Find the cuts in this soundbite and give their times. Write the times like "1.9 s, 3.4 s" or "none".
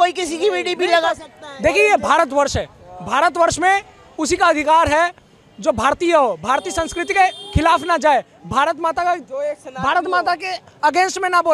none